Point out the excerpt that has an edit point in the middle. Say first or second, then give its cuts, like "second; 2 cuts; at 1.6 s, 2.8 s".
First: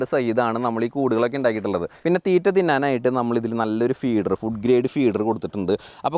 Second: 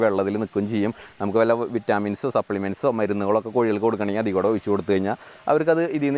first; 1 cut; at 1.9 s